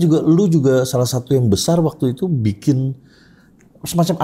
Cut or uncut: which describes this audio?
uncut